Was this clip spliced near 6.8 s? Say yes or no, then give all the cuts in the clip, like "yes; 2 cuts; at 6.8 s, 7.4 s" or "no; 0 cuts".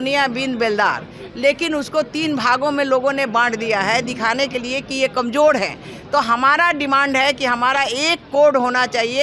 no; 0 cuts